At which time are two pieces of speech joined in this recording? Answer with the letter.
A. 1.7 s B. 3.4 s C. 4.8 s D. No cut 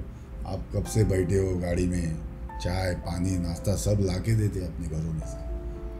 D